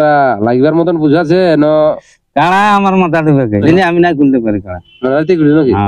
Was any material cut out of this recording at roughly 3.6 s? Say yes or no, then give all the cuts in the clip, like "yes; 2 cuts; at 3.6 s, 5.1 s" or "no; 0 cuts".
yes; 1 cut; at 3.6 s